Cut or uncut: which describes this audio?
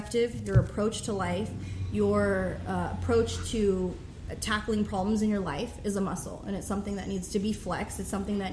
uncut